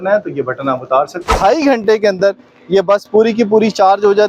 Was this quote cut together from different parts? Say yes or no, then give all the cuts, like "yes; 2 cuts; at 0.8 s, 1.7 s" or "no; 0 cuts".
yes; 1 cut; at 1.3 s